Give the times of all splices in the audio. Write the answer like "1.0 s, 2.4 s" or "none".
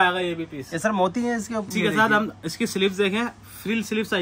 1.7 s